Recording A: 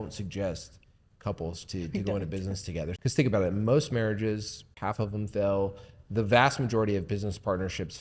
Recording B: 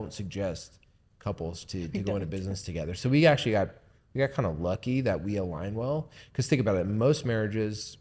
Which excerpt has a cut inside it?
A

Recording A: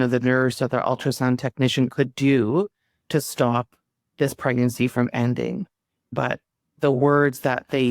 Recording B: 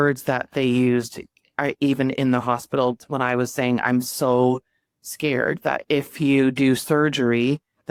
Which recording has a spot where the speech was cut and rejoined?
A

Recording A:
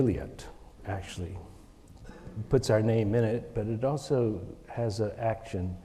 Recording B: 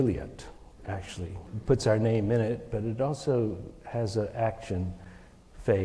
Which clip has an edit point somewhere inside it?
B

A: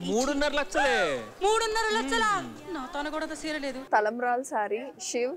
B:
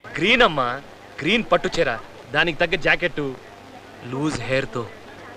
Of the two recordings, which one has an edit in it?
A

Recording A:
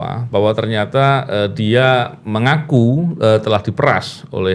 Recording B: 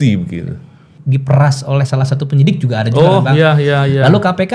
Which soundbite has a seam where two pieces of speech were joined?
B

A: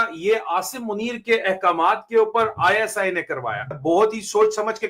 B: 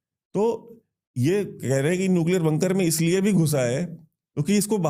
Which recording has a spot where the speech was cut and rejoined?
A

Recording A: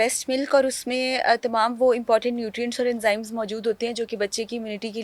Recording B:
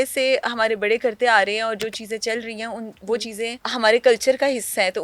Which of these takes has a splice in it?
B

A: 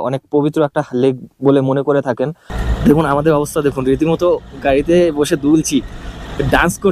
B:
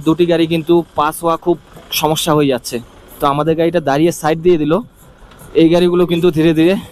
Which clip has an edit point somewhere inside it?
A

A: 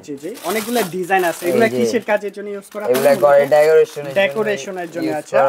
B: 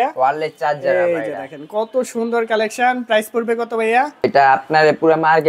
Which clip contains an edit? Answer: B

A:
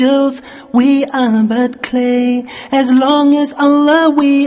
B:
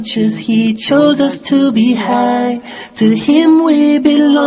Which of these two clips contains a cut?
B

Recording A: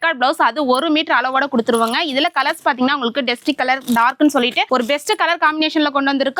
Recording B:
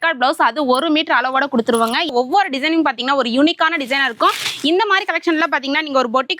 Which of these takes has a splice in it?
B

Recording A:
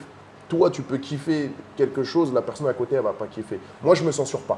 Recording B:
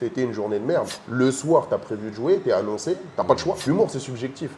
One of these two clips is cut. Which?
B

